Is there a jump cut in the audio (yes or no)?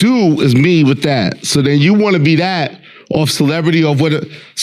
no